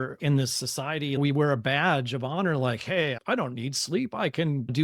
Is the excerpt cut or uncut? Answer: cut